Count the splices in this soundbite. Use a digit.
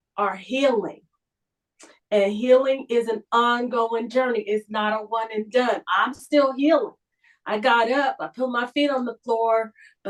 0